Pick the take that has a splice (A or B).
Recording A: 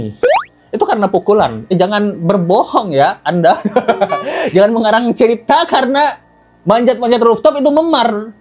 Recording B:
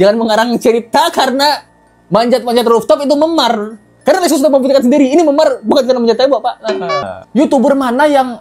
B